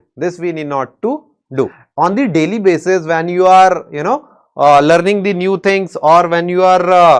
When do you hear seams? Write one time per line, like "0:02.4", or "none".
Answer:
0:01.8